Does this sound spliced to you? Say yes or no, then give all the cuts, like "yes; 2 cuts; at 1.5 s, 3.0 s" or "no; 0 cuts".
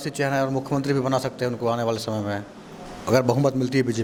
no; 0 cuts